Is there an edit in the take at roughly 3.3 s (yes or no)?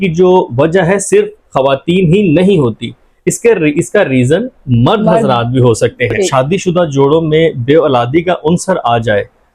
no